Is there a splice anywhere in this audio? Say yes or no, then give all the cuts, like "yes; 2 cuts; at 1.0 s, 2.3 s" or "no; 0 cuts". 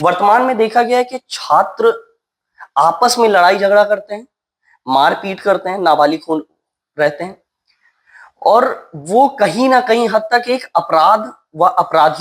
no; 0 cuts